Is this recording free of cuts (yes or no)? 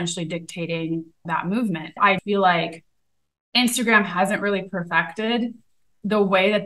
no